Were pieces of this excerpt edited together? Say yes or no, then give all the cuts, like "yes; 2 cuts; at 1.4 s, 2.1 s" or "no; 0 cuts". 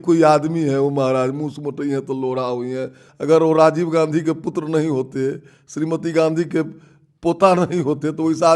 yes; 1 cut; at 3.0 s